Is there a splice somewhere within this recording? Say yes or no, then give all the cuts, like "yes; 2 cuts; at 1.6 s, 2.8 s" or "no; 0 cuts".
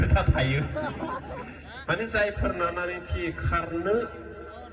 no; 0 cuts